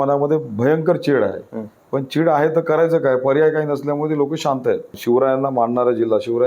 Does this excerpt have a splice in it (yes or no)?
yes